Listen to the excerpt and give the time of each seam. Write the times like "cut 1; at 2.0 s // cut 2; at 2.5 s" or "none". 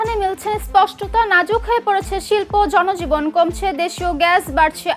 none